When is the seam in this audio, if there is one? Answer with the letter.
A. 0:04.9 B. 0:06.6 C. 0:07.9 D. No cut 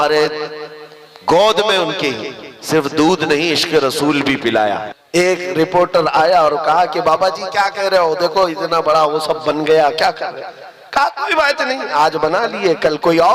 A